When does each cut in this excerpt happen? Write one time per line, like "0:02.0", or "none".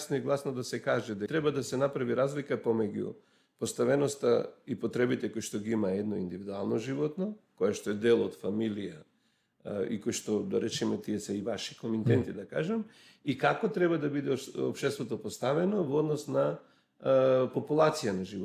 0:01.2